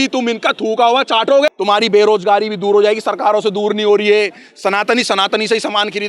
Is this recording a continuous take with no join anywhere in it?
no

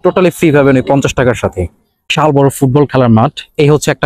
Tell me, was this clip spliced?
yes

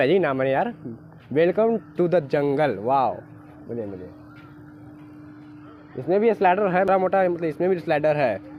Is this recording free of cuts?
yes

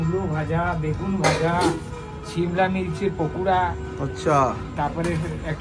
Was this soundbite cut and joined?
no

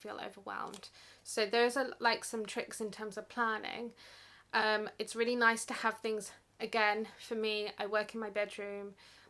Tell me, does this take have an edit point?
no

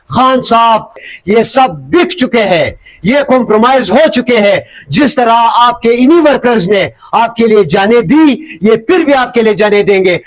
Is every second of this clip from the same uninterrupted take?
no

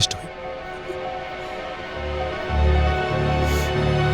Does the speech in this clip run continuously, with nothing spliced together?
yes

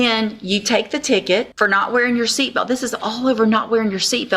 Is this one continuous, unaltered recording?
no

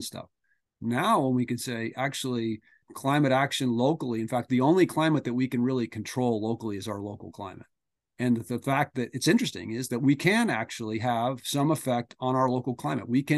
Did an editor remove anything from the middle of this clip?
yes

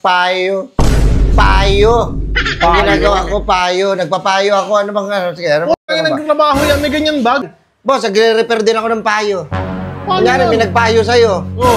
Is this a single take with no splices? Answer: no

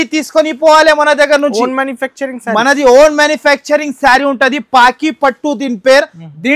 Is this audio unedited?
yes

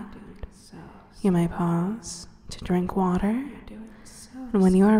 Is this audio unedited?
yes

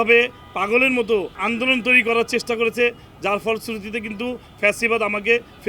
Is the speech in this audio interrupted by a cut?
yes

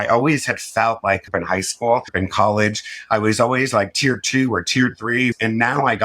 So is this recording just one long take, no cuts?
no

